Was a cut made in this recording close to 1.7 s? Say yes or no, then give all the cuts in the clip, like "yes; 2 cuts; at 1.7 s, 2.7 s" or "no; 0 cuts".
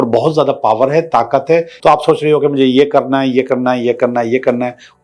yes; 1 cut; at 1.7 s